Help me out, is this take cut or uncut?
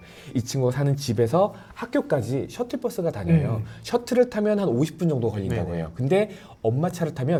uncut